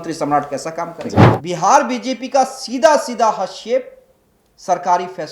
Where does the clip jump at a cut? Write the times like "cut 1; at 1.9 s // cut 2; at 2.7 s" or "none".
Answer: cut 1; at 1.3 s